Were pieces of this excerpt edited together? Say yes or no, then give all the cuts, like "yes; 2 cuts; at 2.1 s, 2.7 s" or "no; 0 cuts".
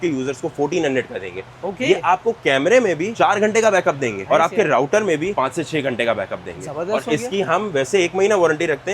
no; 0 cuts